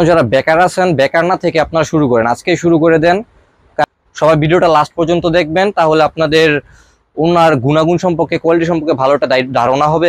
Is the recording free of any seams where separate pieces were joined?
no; 1 cut; at 3.8 s

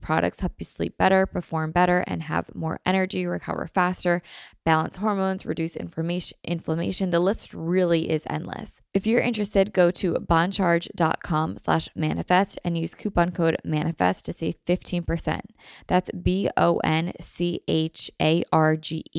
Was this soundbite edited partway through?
yes; 1 cut; at 8.7 s

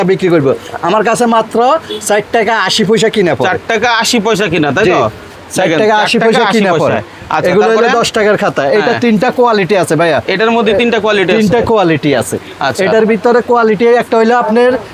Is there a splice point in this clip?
no; 0 cuts

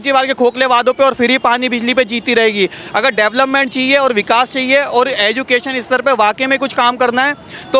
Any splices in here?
no; 0 cuts

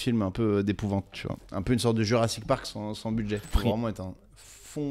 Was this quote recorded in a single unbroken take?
no; 1 cut; at 3.5 s

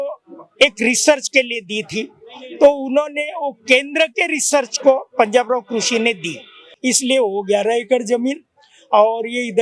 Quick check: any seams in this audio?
yes; 1 cut; at 6.7 s

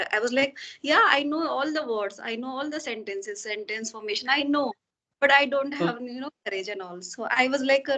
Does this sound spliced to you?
no; 0 cuts

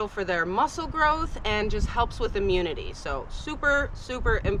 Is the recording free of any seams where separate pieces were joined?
yes; 0 cuts

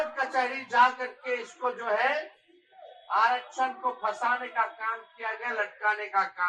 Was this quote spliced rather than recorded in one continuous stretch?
no; 0 cuts

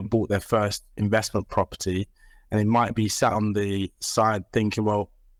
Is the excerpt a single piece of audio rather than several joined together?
yes; 0 cuts

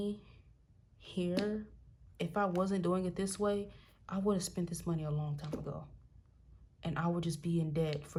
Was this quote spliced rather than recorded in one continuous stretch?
no; 0 cuts

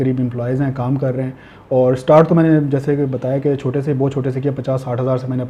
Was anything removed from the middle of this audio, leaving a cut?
no; 0 cuts

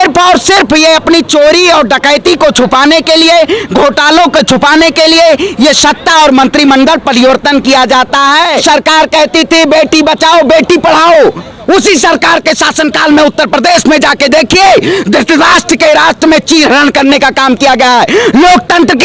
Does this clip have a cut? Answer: yes; 1 cut; at 8.6 s

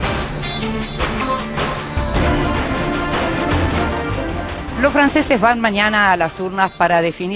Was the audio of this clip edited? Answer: no; 0 cuts

